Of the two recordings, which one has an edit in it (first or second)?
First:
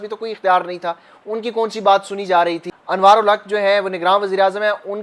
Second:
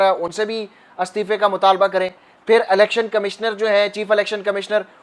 first